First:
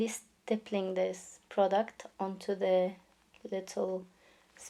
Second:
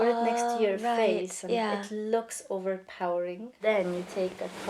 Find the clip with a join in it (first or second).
second